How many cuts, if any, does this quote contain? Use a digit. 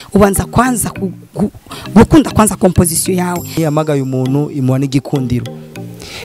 1